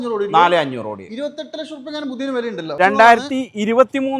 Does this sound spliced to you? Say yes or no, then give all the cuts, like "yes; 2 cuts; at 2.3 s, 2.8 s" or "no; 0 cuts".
yes; 1 cut; at 2.8 s